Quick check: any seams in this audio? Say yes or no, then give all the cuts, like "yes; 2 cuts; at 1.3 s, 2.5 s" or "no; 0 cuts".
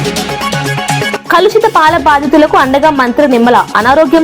yes; 1 cut; at 1.1 s